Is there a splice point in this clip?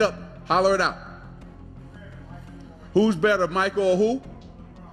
no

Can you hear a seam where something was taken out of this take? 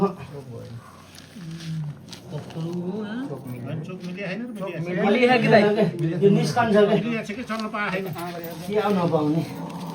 no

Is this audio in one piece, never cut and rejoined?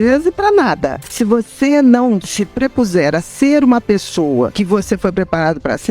no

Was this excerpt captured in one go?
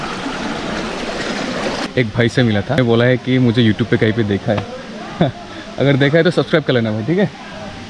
no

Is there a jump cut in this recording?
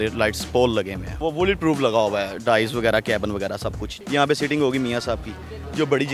yes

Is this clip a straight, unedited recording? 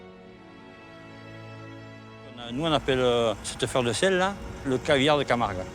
no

